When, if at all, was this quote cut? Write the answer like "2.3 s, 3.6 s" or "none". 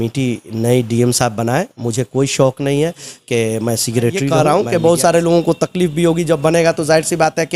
4.3 s